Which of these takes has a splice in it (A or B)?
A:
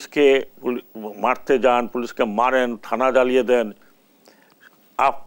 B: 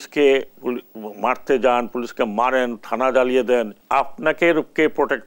B